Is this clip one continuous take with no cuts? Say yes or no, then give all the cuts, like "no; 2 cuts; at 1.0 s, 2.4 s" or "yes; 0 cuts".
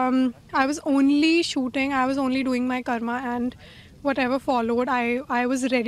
yes; 0 cuts